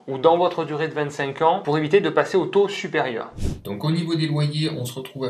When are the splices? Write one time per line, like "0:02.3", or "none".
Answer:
0:03.2